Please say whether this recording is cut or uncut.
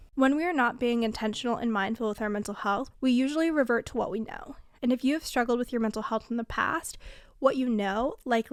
uncut